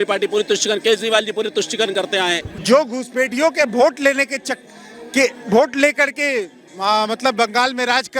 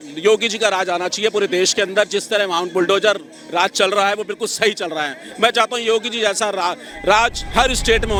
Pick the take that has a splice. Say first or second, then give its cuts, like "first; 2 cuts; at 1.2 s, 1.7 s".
first; 1 cut; at 2.4 s